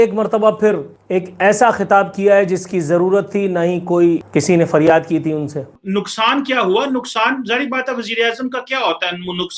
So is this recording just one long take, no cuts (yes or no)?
no